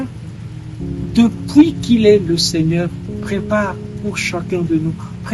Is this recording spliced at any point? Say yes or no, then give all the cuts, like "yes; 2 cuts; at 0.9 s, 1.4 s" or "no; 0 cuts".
no; 0 cuts